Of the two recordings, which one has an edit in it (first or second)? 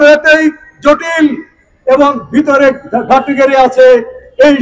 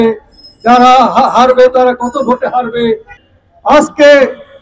second